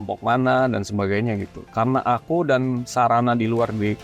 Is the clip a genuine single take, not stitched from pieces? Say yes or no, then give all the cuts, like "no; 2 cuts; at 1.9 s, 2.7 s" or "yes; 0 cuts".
no; 1 cut; at 1.6 s